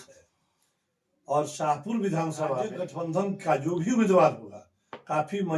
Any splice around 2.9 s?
yes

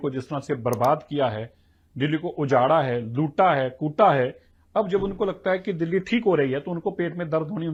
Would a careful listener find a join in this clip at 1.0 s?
no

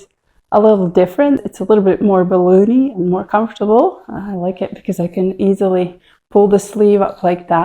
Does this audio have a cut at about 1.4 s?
yes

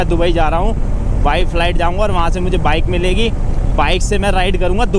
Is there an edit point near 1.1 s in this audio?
no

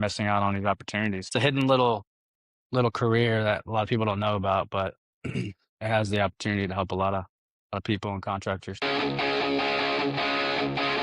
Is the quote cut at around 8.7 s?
yes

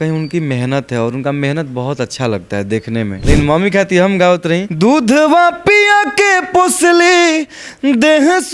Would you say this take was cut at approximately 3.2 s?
yes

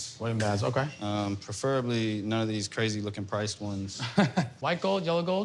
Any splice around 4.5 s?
yes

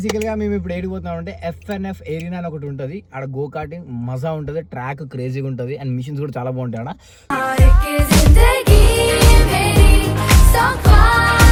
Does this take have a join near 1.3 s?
no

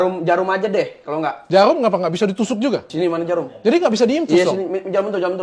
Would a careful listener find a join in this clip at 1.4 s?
yes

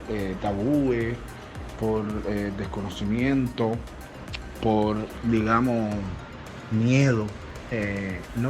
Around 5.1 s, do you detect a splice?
yes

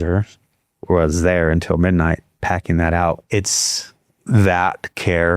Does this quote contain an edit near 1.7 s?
no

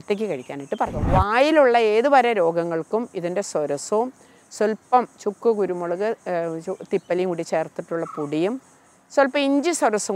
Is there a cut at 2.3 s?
no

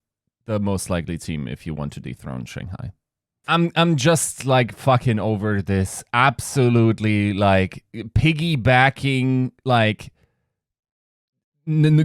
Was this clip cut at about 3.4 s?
yes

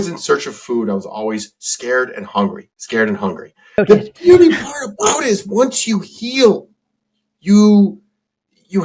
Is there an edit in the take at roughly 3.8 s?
yes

